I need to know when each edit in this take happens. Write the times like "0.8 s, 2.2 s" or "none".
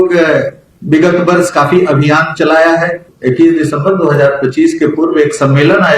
3.1 s